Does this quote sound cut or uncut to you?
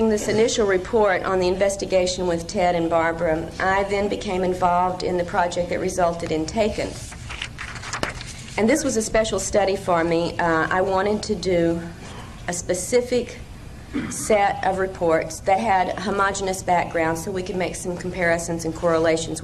uncut